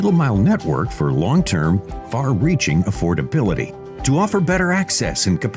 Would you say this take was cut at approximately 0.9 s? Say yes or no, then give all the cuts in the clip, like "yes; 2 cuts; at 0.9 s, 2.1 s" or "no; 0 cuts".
no; 1 cut; at 3.8 s